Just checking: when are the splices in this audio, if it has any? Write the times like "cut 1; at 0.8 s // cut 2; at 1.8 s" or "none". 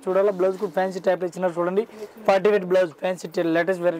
none